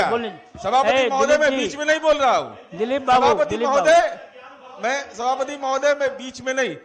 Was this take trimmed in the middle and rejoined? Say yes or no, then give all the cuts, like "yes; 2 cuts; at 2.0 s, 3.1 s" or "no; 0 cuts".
no; 0 cuts